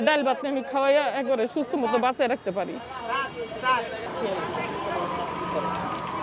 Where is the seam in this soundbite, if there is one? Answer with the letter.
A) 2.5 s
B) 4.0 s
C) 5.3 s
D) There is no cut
B